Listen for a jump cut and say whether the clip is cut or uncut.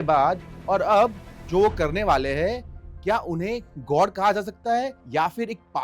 uncut